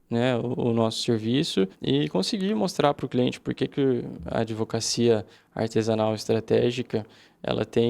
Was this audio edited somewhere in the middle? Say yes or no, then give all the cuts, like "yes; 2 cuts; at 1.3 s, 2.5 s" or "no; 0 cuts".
yes; 1 cut; at 1.8 s